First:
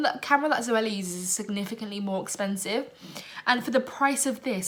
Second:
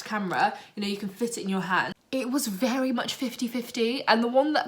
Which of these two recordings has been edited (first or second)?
second